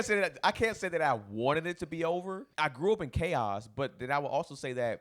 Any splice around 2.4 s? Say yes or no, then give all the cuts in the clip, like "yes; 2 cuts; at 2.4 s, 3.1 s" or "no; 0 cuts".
yes; 1 cut; at 2.4 s